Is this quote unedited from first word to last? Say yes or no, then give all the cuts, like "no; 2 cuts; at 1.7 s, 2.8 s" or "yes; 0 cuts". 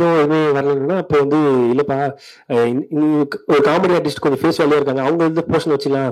yes; 0 cuts